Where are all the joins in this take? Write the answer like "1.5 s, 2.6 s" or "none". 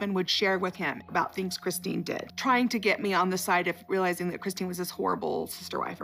none